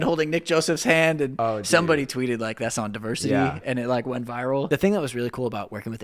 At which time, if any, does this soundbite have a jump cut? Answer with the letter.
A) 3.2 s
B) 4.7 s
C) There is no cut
B